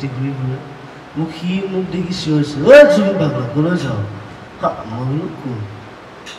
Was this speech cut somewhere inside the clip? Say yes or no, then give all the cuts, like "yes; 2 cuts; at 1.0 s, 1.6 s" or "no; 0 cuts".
no; 0 cuts